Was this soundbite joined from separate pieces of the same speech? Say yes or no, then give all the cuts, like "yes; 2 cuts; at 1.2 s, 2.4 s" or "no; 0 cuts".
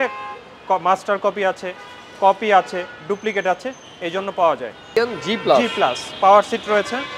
yes; 1 cut; at 4.9 s